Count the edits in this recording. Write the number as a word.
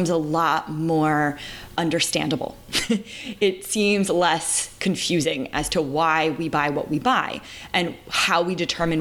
one